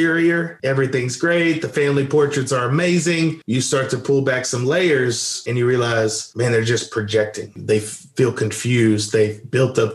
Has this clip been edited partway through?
no; 0 cuts

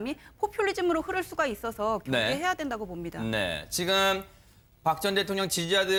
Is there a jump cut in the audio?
no; 0 cuts

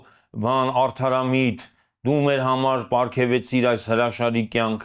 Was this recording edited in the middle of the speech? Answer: no; 0 cuts

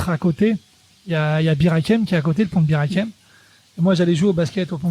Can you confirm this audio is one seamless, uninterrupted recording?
yes; 0 cuts

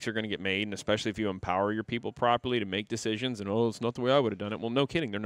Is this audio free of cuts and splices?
yes; 0 cuts

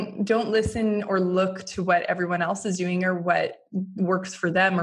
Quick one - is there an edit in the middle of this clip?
no; 0 cuts

